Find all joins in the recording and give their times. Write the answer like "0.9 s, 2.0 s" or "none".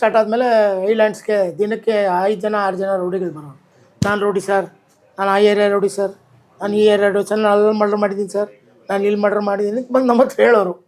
none